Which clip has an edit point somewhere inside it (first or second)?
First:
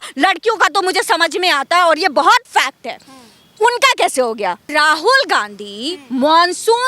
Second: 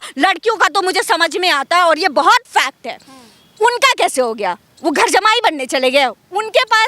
first